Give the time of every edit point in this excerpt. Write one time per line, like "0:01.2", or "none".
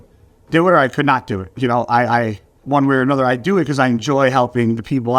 0:02.6